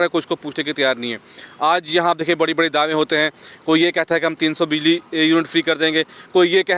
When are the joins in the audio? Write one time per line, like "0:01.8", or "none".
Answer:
none